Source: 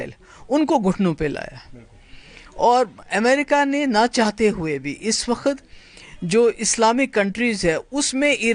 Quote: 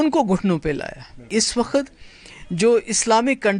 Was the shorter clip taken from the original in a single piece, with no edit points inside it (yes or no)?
no